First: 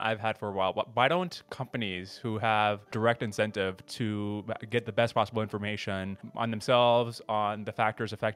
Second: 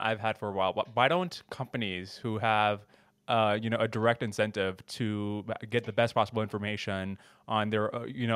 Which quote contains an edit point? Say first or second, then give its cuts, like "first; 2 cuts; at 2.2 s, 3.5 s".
first; 2 cuts; at 2.9 s, 6.2 s